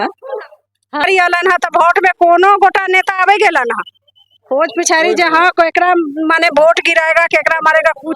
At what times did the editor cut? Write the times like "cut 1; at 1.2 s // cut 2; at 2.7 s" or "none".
cut 1; at 1.0 s